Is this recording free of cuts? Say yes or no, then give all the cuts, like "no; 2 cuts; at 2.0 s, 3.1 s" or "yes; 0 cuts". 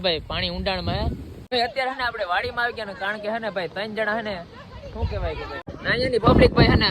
no; 2 cuts; at 1.3 s, 5.5 s